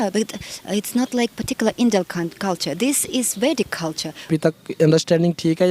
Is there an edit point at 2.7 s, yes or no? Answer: no